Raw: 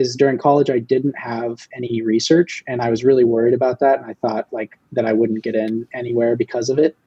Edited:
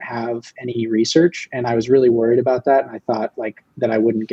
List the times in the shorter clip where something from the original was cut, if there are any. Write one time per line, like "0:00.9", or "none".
none